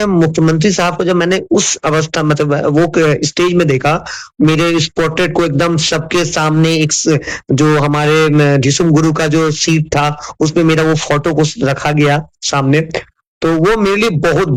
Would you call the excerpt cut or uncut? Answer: uncut